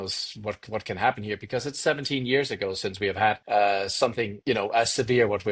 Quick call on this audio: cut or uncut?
cut